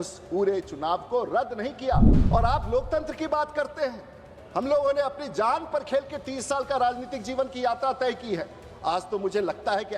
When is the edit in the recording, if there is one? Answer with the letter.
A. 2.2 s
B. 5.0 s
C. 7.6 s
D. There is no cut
A